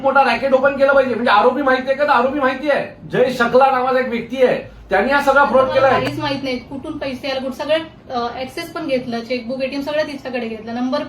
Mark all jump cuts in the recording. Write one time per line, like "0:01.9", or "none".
0:03.0
0:06.0